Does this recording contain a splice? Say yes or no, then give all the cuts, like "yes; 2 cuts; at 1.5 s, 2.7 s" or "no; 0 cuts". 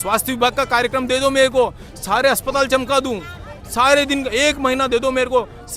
no; 0 cuts